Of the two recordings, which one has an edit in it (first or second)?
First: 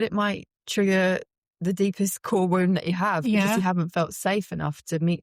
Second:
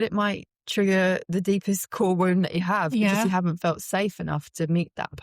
second